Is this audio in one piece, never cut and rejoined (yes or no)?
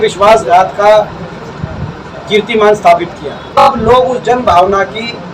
no